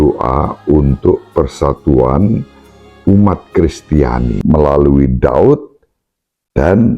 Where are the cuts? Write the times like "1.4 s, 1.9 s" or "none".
4.3 s